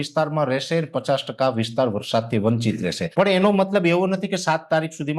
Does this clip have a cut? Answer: yes; 1 cut; at 3.0 s

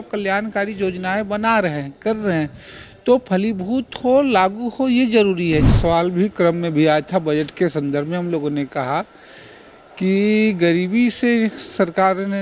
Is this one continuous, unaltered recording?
no; 1 cut; at 5.7 s

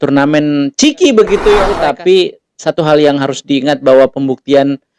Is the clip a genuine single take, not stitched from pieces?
no; 1 cut; at 1.7 s

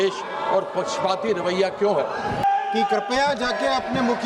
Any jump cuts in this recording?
yes; 1 cut; at 2.4 s

